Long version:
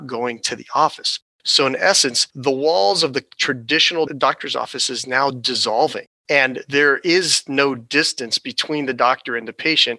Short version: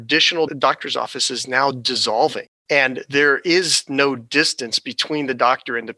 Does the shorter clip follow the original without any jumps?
yes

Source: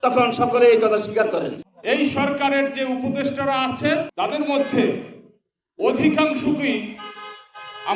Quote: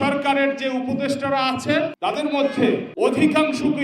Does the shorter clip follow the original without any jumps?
no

